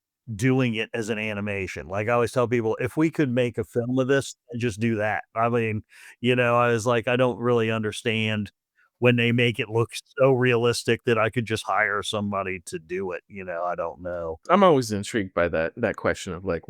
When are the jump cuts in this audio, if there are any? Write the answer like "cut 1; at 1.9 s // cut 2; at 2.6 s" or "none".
cut 1; at 14.4 s